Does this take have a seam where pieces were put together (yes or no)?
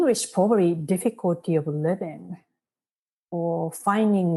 no